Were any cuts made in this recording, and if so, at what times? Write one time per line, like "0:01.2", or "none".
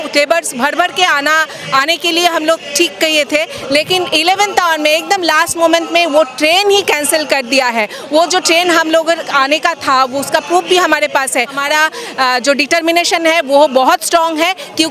0:11.6

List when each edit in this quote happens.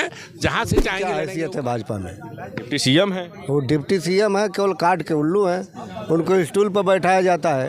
0:01.0

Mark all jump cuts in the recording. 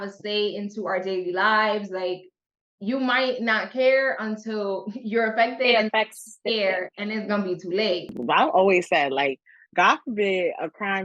0:08.2

